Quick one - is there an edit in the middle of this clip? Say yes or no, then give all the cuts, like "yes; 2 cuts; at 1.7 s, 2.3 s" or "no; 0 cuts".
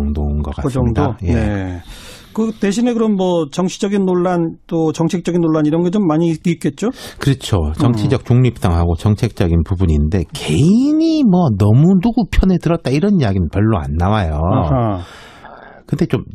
yes; 1 cut; at 8.4 s